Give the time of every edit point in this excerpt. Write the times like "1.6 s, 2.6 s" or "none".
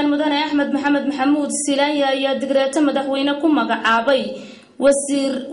none